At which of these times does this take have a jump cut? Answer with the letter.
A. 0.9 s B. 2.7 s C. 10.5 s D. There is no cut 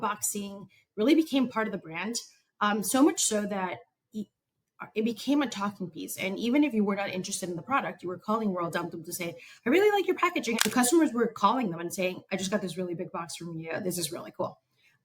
C